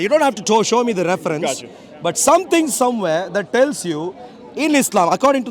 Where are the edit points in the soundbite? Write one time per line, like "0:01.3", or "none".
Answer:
none